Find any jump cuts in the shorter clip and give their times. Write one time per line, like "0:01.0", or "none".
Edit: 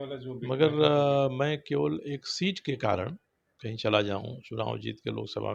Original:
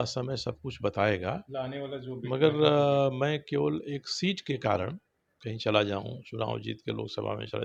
none